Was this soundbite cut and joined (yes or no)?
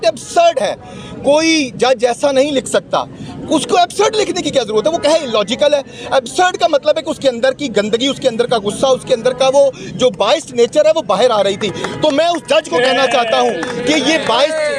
no